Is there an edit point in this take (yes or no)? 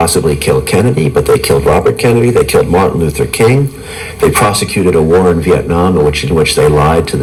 no